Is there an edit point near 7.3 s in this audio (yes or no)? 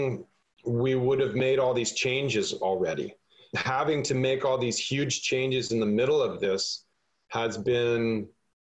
no